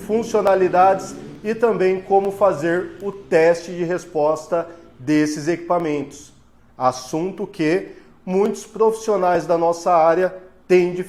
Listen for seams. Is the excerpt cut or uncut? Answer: uncut